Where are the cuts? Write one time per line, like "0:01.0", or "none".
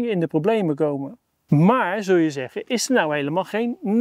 0:01.3